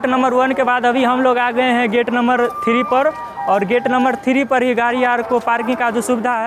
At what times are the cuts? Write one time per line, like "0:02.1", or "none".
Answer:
none